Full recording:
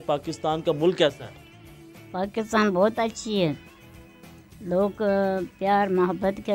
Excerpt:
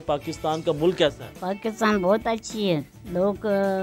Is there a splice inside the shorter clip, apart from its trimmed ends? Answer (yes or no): yes